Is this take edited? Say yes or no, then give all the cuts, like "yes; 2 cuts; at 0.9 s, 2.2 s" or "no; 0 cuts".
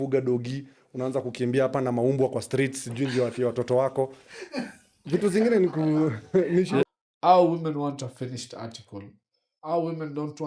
yes; 1 cut; at 6.9 s